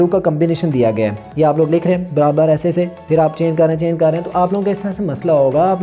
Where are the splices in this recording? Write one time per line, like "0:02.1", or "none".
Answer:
0:01.2